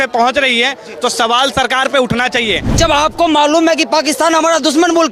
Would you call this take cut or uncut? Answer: cut